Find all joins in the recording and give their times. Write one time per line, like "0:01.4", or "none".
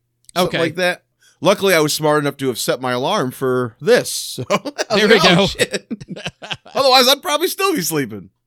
0:01.2